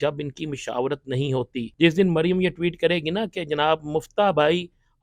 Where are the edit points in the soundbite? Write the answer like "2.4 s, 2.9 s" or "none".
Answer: 1.6 s